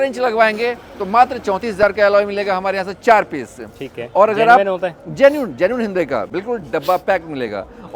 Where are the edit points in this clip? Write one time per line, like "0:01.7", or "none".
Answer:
none